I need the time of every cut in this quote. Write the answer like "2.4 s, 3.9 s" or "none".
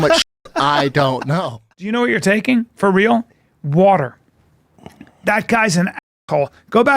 1.7 s